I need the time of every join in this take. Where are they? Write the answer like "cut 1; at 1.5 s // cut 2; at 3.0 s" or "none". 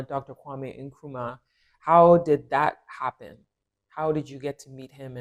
none